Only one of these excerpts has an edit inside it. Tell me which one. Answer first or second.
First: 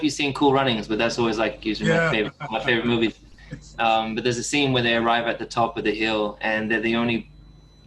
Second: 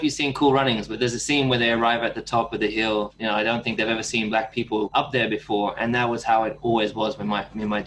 second